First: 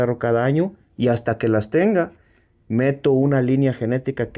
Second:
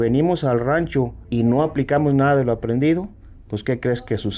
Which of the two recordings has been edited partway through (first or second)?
second